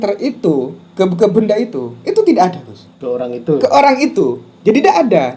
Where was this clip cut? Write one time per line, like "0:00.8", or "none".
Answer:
none

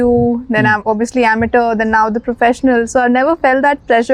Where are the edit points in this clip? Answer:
none

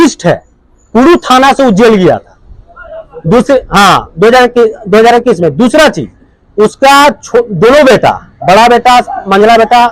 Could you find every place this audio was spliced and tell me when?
none

